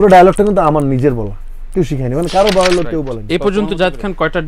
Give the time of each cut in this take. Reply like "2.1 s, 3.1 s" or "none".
3.2 s